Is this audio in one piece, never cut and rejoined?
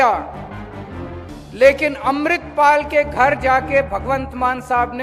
yes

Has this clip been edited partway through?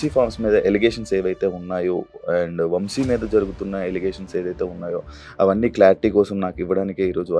no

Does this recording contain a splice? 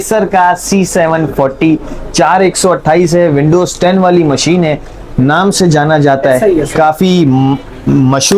no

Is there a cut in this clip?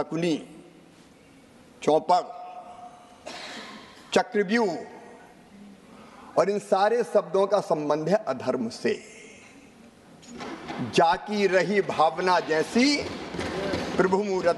no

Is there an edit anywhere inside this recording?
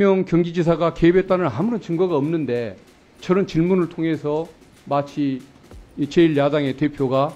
no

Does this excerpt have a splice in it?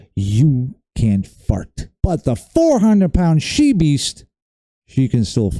yes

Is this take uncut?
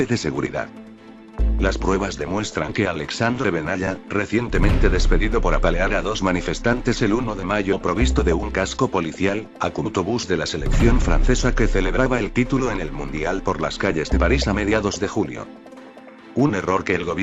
yes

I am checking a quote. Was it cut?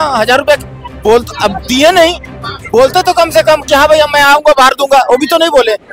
no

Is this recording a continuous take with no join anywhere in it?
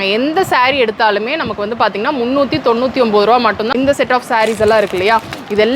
no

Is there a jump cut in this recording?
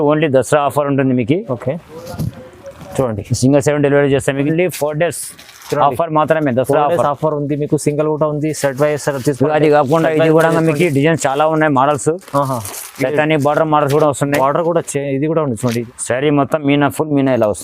yes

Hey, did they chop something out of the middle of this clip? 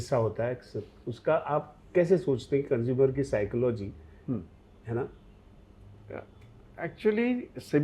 no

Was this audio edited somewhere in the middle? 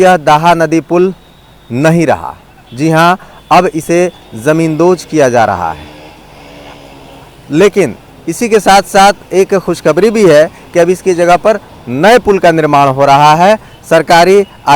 no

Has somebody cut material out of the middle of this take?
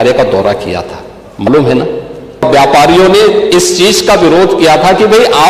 yes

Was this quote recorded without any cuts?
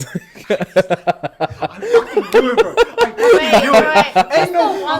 yes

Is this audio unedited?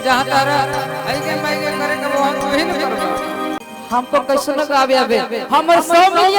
no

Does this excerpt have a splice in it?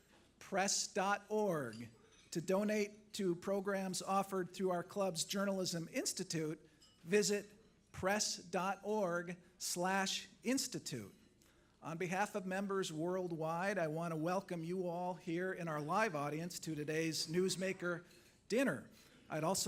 no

